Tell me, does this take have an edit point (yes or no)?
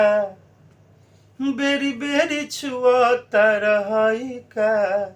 no